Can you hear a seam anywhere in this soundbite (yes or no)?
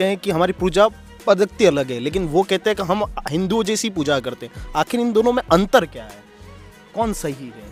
no